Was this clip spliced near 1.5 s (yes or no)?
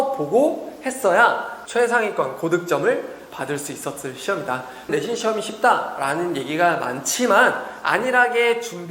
yes